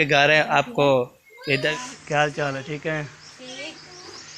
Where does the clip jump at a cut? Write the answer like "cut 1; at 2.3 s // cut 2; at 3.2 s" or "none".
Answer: cut 1; at 1.7 s